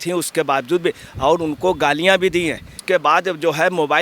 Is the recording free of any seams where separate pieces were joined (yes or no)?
no